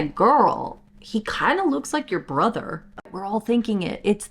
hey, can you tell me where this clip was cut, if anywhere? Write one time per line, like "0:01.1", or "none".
0:03.1